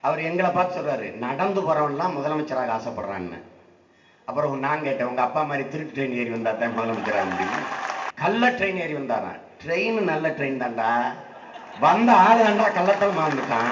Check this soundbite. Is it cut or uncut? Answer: cut